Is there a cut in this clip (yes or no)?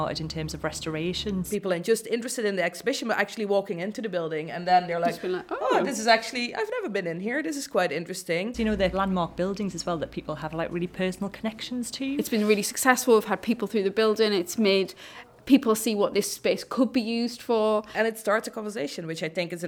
yes